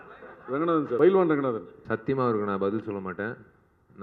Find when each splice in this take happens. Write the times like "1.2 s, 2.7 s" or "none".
1.0 s, 1.7 s